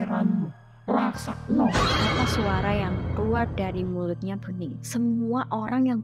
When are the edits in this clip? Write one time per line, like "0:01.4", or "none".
none